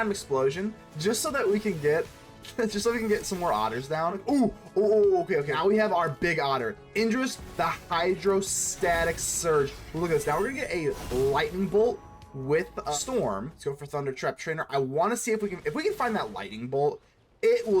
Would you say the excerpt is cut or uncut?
cut